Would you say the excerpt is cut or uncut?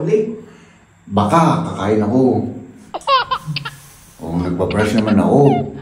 cut